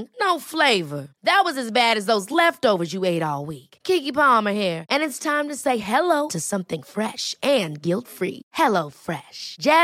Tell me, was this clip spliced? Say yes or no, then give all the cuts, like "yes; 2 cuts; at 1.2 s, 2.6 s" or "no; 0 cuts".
no; 0 cuts